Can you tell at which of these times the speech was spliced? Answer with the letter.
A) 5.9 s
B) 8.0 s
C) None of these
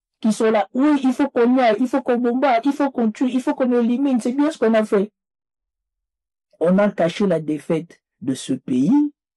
A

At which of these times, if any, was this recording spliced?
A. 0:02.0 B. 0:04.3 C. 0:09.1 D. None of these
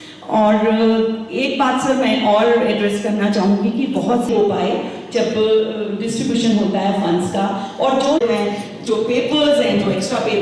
B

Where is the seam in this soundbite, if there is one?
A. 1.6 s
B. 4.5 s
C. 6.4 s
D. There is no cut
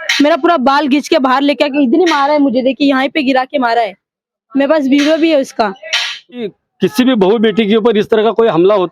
C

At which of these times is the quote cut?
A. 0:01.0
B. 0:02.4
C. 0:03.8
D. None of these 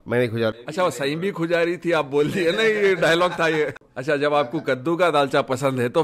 C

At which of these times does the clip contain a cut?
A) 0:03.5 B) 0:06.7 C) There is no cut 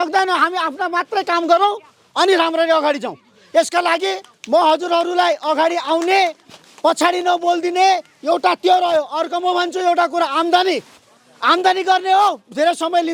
C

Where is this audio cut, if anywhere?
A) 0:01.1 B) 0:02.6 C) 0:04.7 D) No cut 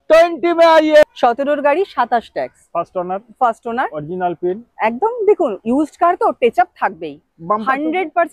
A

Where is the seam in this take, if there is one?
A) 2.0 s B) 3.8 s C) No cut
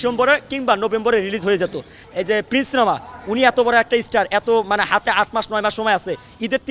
A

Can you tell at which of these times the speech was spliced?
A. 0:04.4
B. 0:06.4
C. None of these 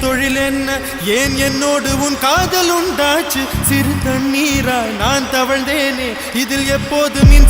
C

